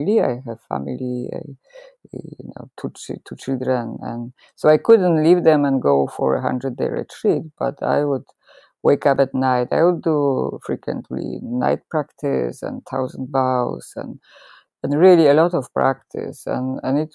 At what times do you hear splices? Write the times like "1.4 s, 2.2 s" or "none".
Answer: none

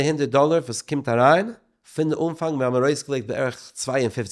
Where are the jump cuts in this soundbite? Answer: none

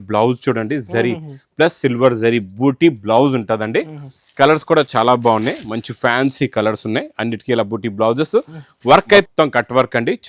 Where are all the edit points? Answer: 9.3 s

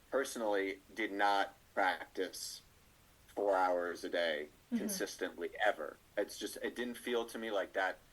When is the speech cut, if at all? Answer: none

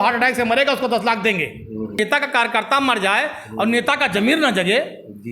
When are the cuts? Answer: 2.0 s

